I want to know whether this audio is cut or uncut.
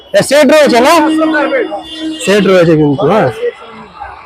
uncut